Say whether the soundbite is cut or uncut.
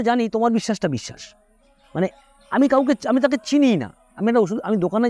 uncut